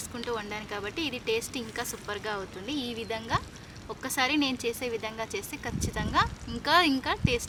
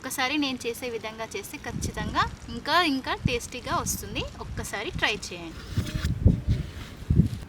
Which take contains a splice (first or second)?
second